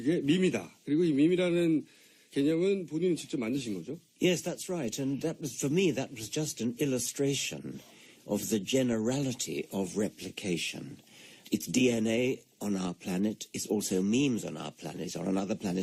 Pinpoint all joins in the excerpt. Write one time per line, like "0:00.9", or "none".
none